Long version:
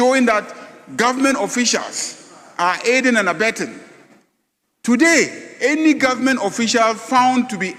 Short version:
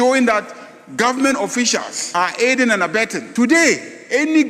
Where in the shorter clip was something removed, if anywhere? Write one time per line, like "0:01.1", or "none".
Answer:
0:02.0
0:03.2